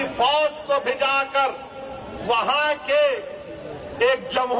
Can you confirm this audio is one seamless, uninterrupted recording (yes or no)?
yes